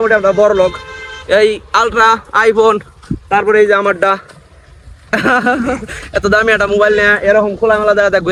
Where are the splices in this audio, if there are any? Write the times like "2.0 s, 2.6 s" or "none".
none